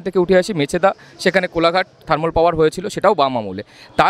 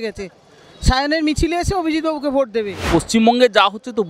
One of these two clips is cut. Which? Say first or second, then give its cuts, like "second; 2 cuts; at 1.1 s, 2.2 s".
second; 1 cut; at 2.9 s